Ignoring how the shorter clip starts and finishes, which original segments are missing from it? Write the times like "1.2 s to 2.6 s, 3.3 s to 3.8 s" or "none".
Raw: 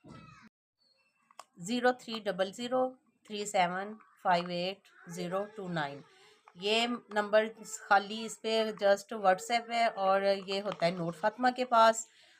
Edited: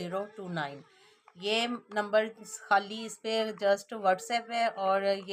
none